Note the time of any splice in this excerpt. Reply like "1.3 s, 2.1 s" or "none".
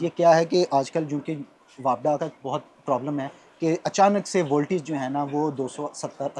none